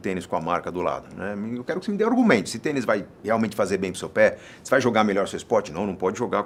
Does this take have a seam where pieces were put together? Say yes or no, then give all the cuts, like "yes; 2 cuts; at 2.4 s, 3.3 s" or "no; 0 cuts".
no; 0 cuts